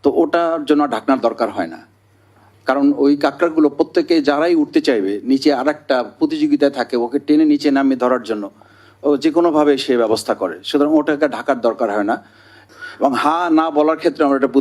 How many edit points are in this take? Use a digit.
1